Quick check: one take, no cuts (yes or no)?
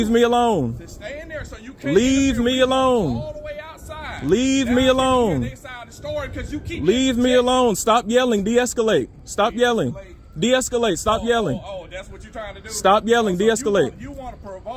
yes